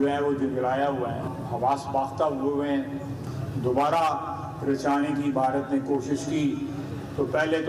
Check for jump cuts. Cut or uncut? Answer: uncut